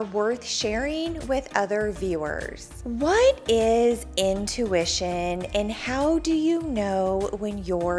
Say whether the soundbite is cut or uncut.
cut